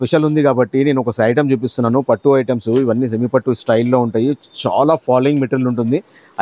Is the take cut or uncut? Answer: uncut